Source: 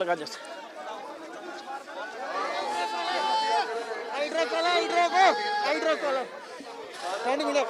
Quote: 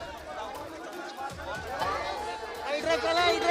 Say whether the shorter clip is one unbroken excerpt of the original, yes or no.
no